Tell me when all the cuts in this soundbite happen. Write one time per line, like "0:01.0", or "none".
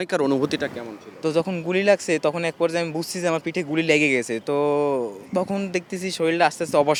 none